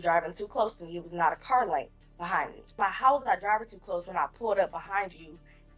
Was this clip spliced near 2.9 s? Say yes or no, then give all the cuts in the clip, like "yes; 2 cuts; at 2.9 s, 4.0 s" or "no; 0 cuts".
yes; 1 cut; at 2.9 s